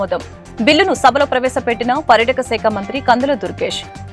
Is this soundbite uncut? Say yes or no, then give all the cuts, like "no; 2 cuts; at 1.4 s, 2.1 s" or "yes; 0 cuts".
yes; 0 cuts